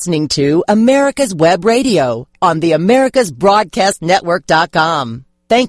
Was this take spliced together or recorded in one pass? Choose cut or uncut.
uncut